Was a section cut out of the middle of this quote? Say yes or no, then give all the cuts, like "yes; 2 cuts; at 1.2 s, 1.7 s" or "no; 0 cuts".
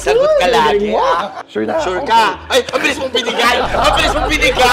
yes; 1 cut; at 1.4 s